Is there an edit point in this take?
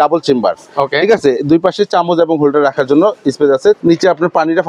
yes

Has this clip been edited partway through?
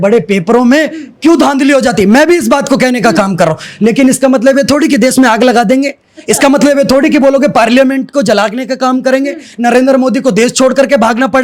no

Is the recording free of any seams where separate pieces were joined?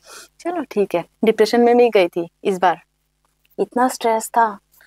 no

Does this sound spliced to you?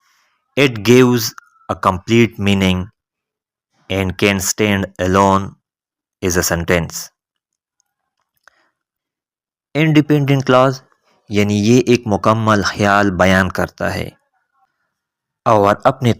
yes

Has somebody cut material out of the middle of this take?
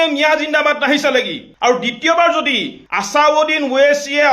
no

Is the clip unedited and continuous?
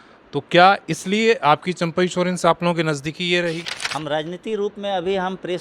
no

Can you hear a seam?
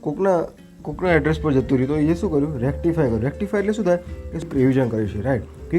yes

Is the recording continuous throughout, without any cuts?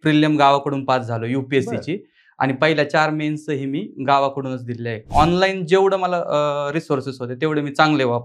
no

